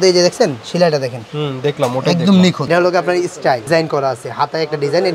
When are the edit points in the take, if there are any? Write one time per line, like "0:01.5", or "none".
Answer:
0:02.6